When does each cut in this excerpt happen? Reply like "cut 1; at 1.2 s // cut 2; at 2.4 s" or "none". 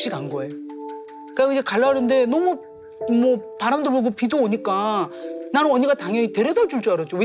none